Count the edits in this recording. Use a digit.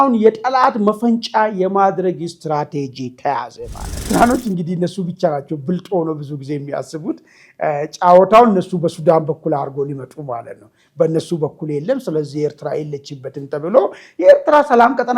1